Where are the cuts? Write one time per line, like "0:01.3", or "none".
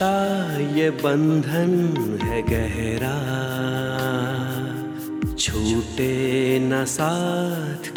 none